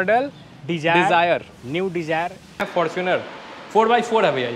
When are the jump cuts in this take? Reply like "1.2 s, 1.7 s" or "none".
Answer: 2.6 s